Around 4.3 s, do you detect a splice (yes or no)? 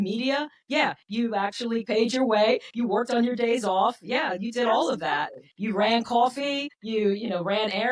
no